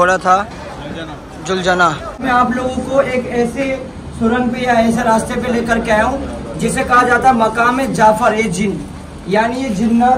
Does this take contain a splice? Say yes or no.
yes